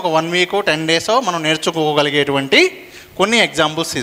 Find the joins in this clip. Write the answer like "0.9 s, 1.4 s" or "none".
none